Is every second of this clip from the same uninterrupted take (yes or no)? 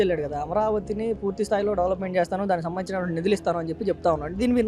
yes